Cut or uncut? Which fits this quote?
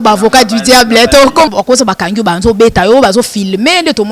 cut